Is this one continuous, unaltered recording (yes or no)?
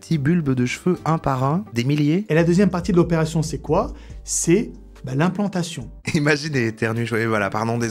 no